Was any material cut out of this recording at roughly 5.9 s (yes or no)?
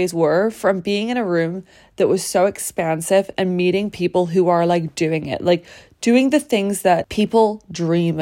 no